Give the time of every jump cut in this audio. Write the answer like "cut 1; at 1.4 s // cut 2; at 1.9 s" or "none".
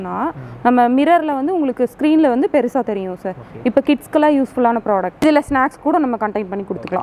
cut 1; at 5.2 s